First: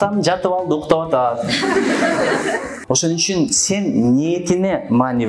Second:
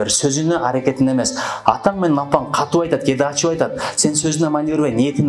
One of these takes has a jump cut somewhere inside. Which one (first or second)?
first